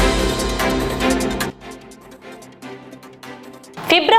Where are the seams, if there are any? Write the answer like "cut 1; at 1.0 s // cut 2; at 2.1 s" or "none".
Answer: cut 1; at 1.4 s

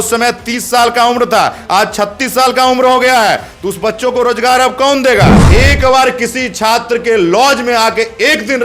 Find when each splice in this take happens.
cut 1; at 5.4 s

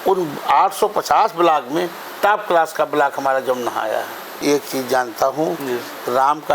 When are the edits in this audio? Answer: cut 1; at 4.4 s

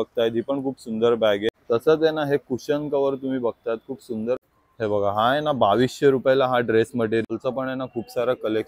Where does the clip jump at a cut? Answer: cut 1; at 1.6 s // cut 2; at 4.4 s // cut 3; at 7.2 s

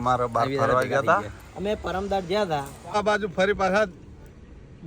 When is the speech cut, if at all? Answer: cut 1; at 3.0 s

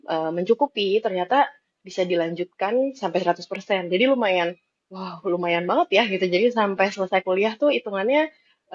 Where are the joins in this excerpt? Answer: none

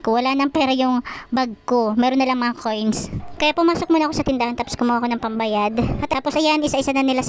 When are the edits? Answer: cut 1; at 6.1 s

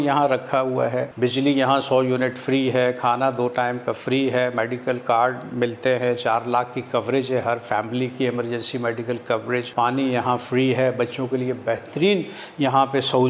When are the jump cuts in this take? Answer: cut 1; at 1.1 s // cut 2; at 9.7 s

